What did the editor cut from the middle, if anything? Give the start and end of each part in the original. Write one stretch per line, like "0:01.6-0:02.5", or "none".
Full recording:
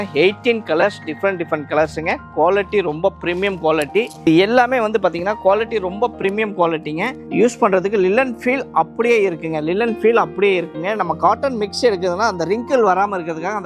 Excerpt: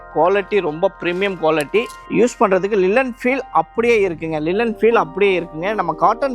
0:04.1-0:07.1